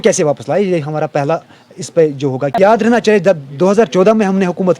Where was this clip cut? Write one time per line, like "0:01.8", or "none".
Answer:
0:02.5